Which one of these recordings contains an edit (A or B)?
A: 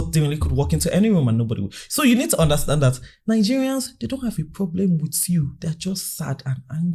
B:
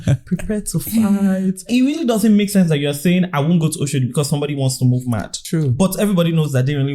B